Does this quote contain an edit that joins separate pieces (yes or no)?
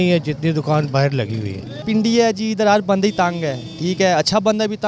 yes